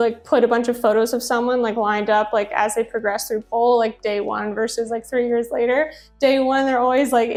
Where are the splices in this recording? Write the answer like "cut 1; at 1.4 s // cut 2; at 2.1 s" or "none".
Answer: none